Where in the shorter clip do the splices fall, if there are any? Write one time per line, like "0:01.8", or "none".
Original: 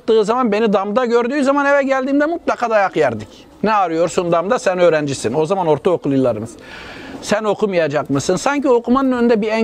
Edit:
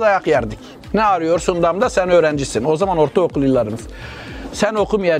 none